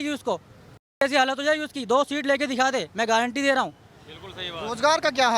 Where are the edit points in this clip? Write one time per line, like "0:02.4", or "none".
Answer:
none